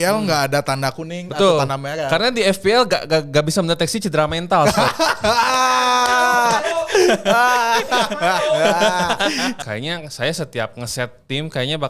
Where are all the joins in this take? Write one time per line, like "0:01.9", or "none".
0:09.6